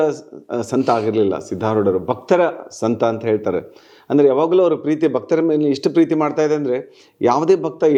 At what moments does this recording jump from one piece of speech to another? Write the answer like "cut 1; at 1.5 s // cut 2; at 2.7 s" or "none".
none